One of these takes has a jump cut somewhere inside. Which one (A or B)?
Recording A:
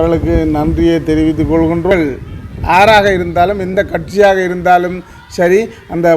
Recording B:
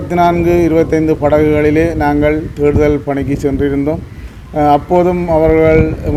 A